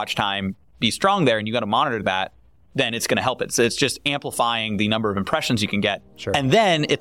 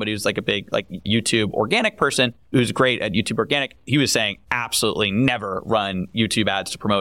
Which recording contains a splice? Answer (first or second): second